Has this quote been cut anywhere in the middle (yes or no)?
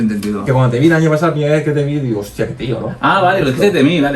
no